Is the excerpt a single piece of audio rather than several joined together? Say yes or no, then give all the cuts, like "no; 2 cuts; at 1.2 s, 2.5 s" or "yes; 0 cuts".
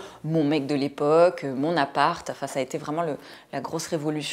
yes; 0 cuts